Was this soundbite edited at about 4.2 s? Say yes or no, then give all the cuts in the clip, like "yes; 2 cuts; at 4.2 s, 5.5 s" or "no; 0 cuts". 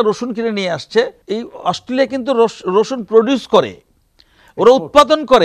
no; 1 cut; at 1.2 s